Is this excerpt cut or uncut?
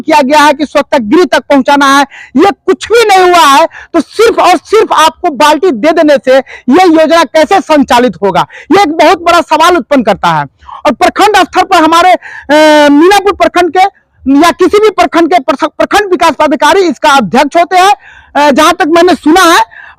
uncut